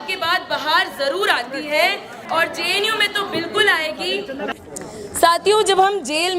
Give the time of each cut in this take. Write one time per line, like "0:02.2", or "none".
0:02.1
0:04.5